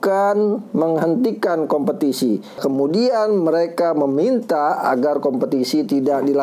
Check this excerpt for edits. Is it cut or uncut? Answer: cut